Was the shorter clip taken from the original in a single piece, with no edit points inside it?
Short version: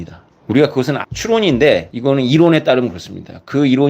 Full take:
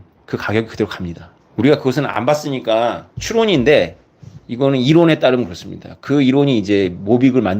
no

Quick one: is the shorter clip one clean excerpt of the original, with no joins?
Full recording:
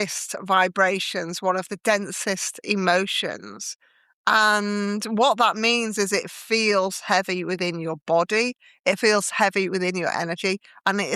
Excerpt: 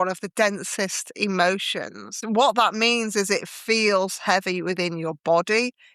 no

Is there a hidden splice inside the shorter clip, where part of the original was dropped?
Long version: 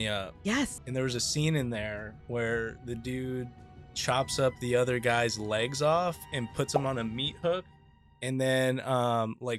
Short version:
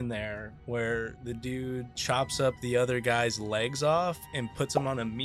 yes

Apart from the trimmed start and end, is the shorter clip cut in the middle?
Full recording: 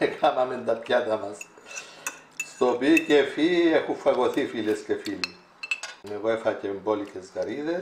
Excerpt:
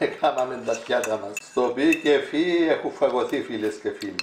yes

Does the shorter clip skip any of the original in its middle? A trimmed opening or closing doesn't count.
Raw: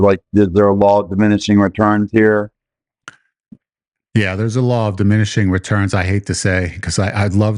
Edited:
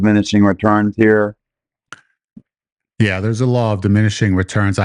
no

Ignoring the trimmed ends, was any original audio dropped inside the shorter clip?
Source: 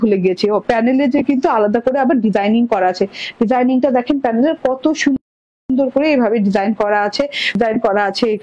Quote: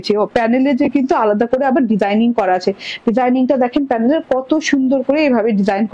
yes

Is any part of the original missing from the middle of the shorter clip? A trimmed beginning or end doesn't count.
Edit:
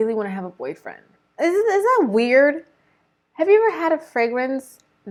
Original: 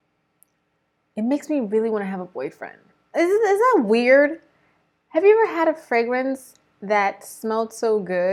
no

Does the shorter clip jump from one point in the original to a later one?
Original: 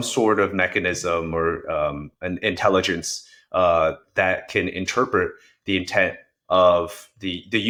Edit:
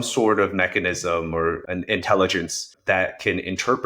yes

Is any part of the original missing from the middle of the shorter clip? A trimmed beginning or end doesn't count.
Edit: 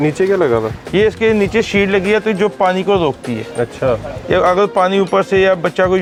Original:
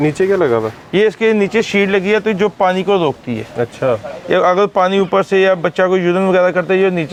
no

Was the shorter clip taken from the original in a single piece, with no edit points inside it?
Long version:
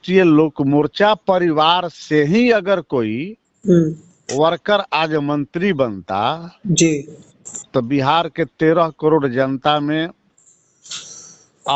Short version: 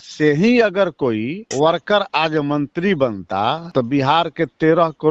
no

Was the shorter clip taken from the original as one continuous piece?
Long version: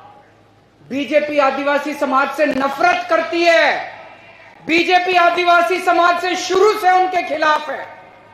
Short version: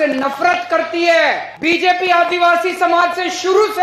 no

